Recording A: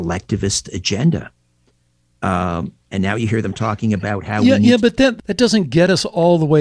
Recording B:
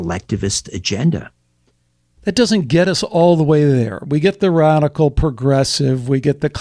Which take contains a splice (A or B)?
B